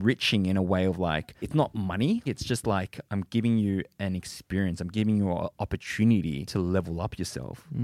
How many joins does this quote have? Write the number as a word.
three